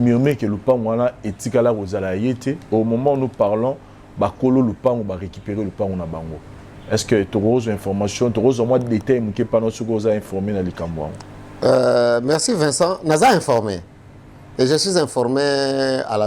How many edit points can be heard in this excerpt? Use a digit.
1